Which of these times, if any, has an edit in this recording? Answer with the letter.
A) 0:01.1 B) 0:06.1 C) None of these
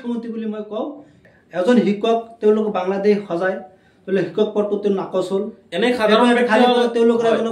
A